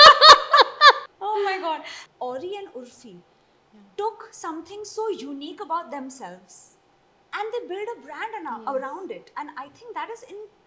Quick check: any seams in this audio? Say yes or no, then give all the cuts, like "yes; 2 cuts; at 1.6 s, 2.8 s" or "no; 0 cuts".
yes; 2 cuts; at 1.0 s, 2.0 s